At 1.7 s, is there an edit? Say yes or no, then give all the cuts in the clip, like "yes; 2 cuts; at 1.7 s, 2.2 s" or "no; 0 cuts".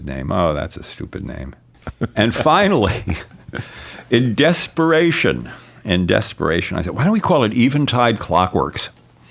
yes; 1 cut; at 1.7 s